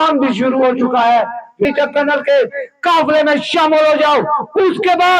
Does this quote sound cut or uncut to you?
cut